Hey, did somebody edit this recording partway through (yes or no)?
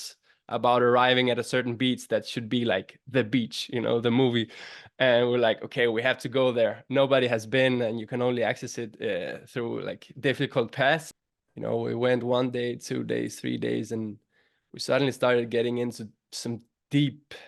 yes